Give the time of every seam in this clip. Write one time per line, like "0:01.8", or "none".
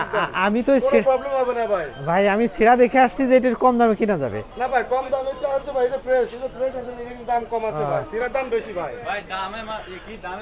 none